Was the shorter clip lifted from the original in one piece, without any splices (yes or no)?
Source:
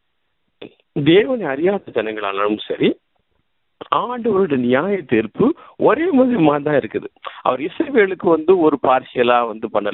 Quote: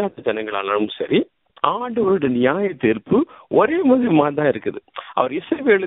no